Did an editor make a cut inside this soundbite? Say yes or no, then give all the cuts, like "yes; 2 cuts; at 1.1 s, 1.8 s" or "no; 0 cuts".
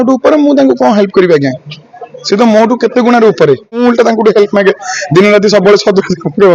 yes; 1 cut; at 3.8 s